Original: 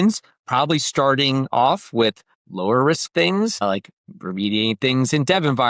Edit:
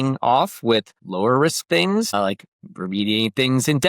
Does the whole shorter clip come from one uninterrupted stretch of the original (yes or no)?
no